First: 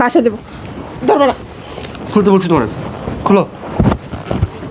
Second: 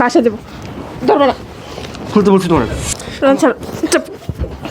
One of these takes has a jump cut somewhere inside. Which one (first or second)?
second